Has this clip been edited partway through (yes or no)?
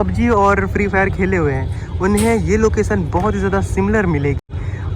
no